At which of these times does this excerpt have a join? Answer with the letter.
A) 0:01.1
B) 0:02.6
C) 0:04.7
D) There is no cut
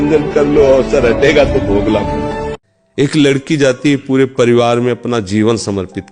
B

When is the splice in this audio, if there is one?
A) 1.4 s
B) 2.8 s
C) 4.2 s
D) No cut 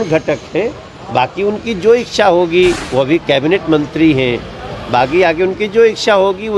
B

